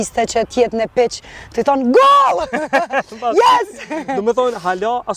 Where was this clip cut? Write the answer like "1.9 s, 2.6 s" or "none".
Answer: none